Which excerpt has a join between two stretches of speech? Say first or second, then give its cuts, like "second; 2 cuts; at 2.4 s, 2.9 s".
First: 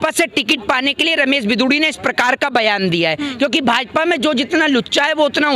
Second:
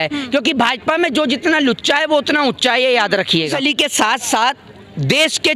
second; 1 cut; at 3.5 s